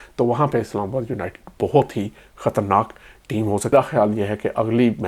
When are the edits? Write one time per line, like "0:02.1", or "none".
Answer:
0:03.7